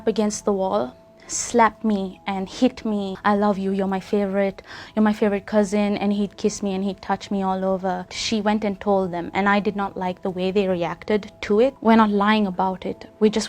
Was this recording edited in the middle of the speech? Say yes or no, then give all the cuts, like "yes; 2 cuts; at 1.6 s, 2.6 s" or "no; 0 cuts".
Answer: yes; 3 cuts; at 3.1 s, 8.2 s, 11.8 s